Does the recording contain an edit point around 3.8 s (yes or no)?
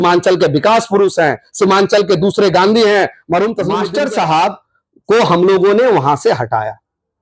yes